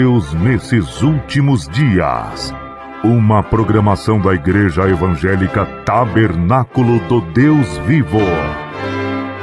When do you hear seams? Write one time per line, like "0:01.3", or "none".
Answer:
0:08.4